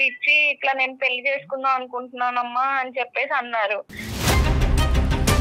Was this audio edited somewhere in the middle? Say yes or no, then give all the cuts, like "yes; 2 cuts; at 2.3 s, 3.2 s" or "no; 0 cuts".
yes; 1 cut; at 4.1 s